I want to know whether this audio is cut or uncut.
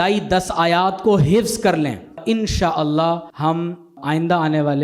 cut